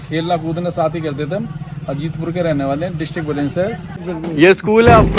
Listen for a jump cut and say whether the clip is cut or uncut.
cut